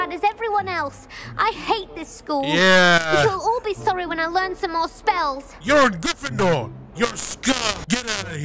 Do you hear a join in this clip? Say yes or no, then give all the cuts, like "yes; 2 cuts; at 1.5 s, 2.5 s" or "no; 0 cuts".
no; 0 cuts